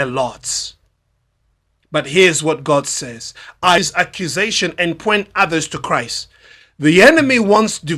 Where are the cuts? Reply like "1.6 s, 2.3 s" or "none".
3.8 s